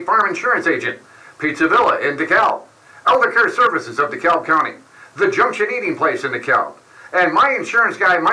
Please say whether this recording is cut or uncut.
uncut